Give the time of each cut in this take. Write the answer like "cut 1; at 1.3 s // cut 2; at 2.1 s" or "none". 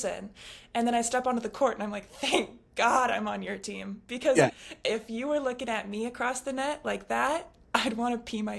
none